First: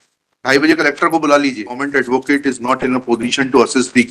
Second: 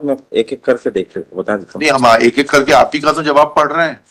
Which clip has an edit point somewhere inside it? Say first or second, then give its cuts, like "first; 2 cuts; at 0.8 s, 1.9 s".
first; 1 cut; at 1.8 s